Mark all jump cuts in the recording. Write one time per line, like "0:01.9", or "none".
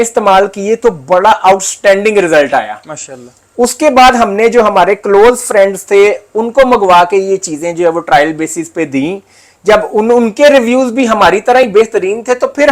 none